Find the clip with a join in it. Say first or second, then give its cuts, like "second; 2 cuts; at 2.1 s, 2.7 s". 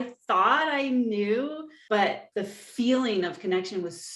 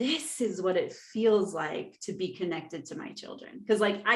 first; 2 cuts; at 1.7 s, 2.2 s